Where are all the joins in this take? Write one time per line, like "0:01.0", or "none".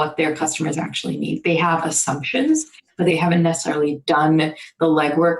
0:03.1